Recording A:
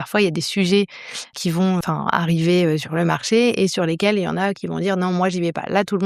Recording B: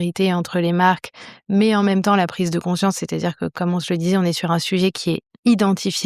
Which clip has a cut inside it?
A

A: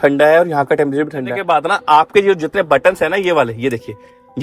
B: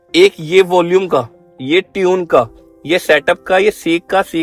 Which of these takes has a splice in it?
A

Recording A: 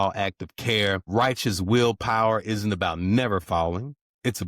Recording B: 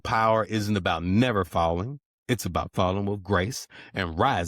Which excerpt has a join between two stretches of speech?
A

